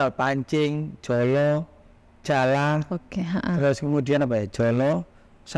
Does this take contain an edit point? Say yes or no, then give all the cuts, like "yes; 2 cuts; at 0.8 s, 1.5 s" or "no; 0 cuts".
no; 0 cuts